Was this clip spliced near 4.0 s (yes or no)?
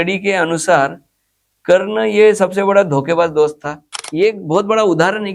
yes